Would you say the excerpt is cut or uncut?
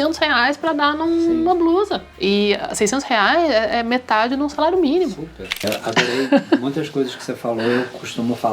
cut